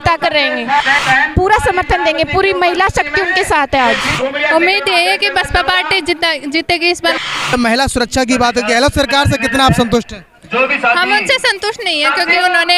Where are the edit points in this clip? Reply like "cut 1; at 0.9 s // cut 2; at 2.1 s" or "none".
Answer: cut 1; at 1.0 s // cut 2; at 4.1 s // cut 3; at 7.2 s